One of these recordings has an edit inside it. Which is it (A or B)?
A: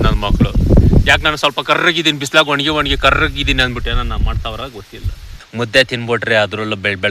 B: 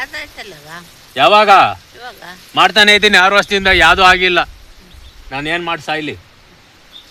A